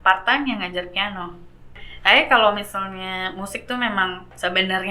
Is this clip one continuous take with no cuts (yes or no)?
no